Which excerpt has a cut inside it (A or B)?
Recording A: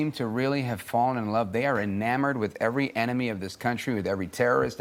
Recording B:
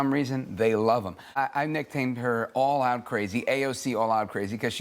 B